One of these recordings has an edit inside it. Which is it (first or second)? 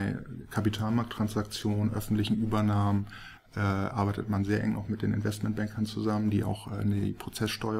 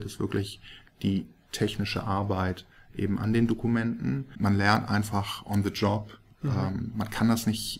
second